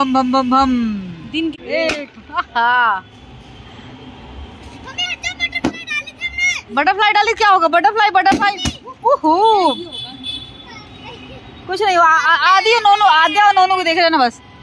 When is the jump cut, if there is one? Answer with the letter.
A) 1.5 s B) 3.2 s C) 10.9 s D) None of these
A